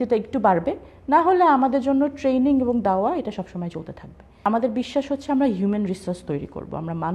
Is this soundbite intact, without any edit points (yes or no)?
no